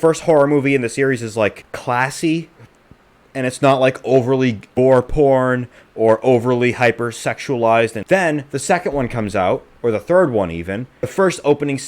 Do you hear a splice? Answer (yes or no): yes